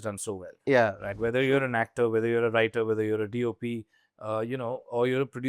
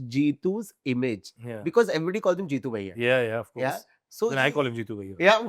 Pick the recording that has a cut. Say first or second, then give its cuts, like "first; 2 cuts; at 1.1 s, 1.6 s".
first; 1 cut; at 1.1 s